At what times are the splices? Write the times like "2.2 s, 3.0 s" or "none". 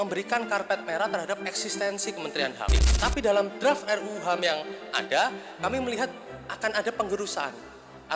2.8 s